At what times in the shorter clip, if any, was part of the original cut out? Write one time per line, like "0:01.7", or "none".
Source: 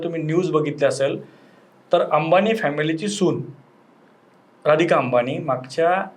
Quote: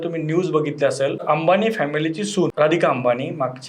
0:01.2
0:02.5